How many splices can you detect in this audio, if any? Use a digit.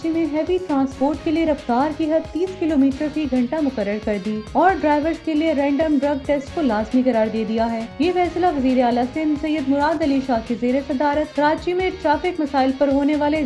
0